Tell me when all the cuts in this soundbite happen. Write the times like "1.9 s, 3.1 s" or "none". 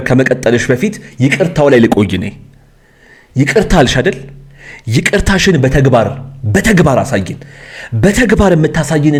none